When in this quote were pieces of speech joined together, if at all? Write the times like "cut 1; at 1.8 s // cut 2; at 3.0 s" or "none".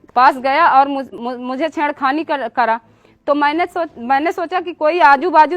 cut 1; at 1.1 s